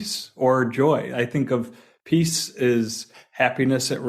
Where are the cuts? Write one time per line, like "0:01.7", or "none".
none